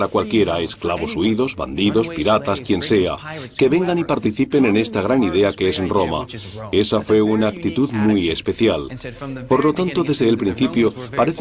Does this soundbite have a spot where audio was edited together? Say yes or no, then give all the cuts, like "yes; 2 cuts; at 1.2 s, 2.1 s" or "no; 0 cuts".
yes; 1 cut; at 7.0 s